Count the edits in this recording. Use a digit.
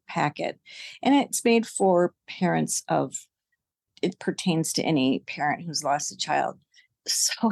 1